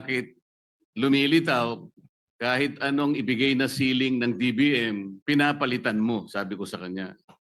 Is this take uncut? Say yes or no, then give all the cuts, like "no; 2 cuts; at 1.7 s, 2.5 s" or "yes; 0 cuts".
no; 1 cut; at 5.1 s